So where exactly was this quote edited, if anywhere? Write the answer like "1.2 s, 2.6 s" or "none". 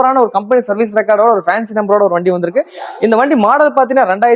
none